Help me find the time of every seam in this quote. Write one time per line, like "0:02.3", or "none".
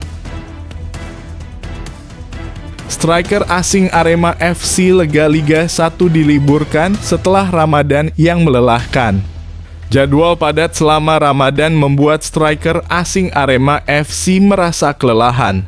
0:03.0

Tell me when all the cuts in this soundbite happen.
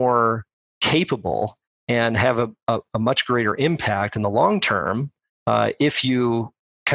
none

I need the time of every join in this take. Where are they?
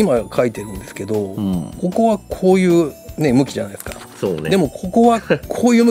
none

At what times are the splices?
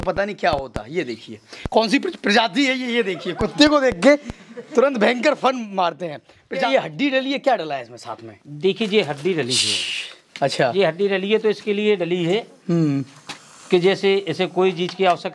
0:06.7

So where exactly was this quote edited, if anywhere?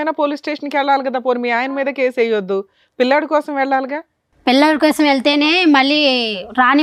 none

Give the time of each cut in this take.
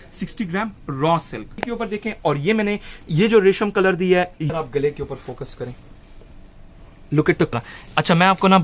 0:01.6
0:04.4
0:07.5

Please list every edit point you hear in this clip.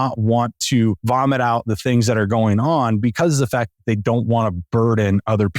0:01.0

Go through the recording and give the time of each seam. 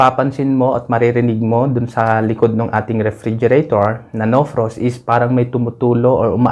none

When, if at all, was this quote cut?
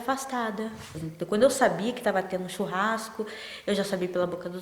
0:01.0

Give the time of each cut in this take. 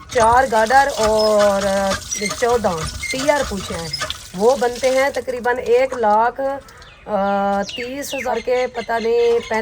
0:03.7
0:08.3

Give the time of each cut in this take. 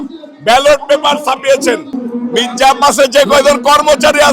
0:01.9

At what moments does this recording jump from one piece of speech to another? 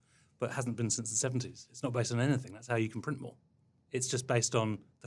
0:03.8

